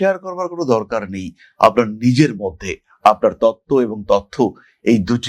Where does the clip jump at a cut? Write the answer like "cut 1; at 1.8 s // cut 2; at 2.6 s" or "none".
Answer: none

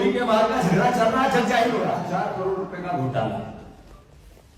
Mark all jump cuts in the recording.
cut 1; at 2.0 s

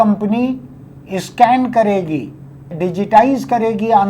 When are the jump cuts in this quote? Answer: cut 1; at 2.7 s

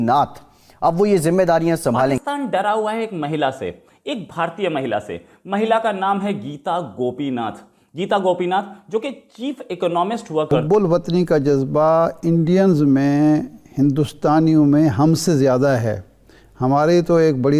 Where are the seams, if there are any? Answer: cut 1; at 2.2 s // cut 2; at 10.6 s

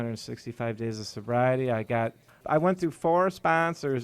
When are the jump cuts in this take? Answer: cut 1; at 2.4 s

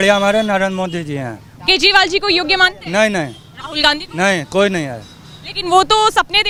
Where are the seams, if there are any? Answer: none

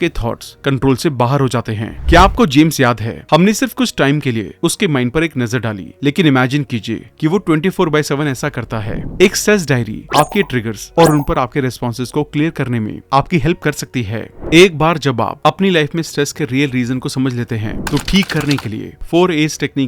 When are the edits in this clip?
cut 1; at 1.9 s // cut 2; at 9.0 s // cut 3; at 14.3 s

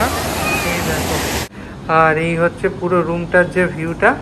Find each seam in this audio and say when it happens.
cut 1; at 1.4 s

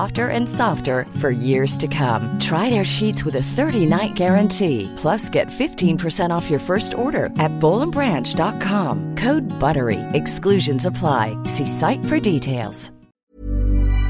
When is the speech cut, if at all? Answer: cut 1; at 13.1 s

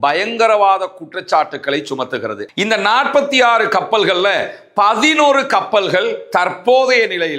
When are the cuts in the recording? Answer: cut 1; at 2.4 s

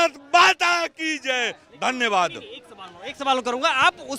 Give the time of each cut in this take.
none

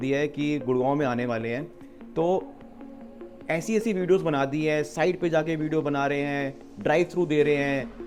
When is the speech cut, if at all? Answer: none

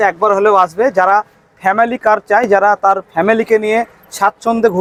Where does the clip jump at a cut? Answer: none

